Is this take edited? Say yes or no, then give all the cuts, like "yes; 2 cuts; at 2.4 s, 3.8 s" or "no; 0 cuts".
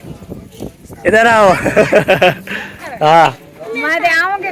yes; 1 cut; at 2.9 s